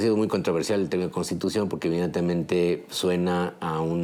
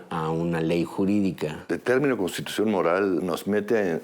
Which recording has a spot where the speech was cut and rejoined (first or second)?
second